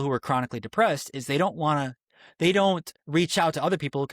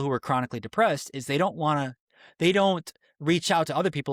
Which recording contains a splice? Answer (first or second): first